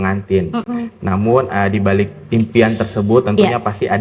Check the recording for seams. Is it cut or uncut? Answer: uncut